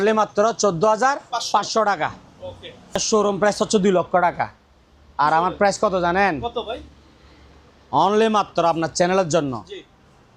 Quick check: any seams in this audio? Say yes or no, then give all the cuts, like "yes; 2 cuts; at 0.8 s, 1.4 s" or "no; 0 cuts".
yes; 1 cut; at 3.0 s